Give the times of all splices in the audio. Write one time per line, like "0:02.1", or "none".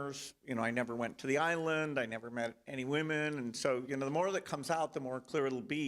0:01.1
0:02.2